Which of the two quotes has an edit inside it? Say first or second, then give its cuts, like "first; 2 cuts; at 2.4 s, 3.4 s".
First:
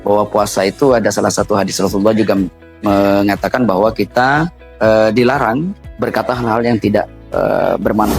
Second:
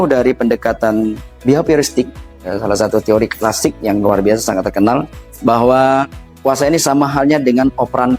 first; 4 cuts; at 2.6 s, 4.6 s, 5.8 s, 7.2 s